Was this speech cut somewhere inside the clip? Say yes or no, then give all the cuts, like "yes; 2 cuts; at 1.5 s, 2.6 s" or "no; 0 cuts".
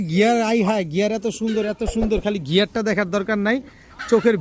no; 0 cuts